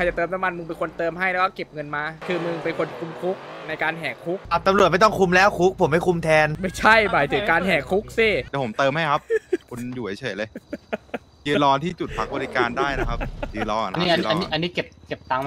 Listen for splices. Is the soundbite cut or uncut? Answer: cut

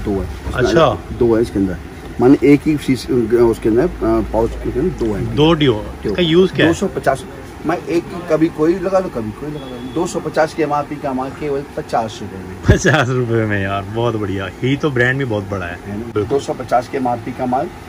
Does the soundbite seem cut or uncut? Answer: uncut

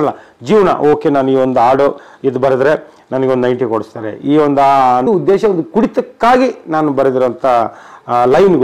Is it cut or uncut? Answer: cut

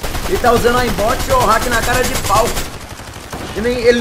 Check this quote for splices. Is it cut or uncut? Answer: uncut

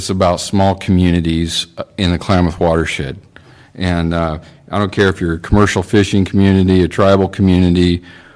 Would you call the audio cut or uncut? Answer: uncut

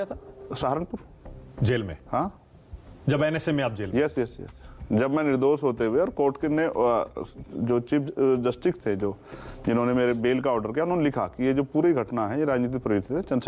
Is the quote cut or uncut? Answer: uncut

